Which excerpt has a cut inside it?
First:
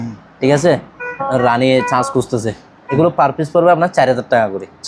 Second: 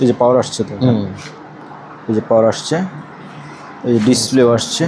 first; 1 cut; at 2.7 s

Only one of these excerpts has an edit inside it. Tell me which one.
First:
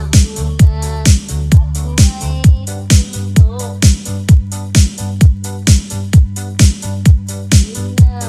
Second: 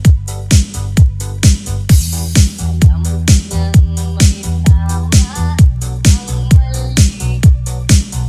second; 1 cut; at 1.9 s

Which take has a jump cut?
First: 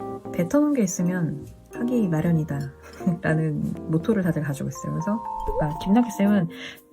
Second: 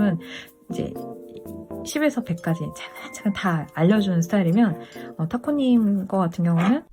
first; 2 cuts; at 3.8 s, 5.4 s

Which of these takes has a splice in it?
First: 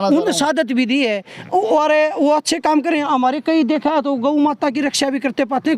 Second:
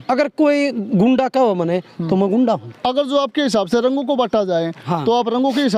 second; 1 cut; at 2.7 s

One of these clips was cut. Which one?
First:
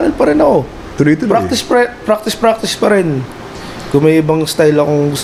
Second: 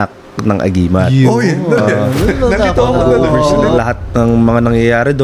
second; 1 cut; at 3.8 s

